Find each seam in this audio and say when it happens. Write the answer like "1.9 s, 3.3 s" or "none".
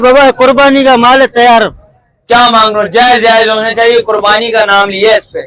none